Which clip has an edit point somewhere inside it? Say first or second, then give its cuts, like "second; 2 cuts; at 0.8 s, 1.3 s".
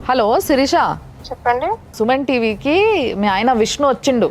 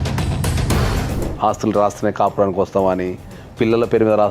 second; 1 cut; at 1.1 s